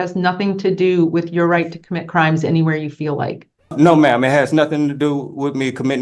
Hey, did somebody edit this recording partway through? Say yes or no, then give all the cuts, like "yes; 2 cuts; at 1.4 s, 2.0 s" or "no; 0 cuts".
yes; 1 cut; at 3.7 s